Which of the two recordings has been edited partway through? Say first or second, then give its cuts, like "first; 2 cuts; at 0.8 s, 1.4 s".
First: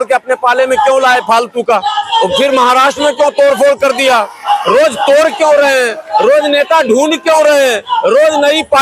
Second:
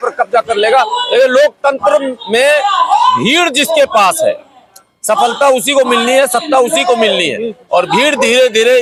first; 1 cut; at 2.1 s